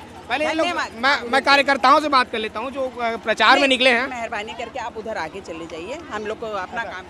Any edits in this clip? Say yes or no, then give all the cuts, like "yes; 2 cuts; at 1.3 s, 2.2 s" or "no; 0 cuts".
no; 0 cuts